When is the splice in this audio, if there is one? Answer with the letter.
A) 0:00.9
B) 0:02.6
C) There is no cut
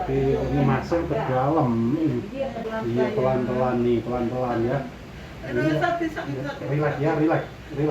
B